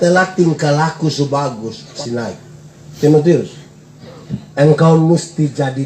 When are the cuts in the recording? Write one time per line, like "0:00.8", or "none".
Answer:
0:02.0